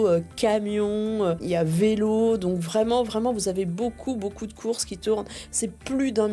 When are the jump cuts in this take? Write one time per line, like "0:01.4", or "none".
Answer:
0:01.4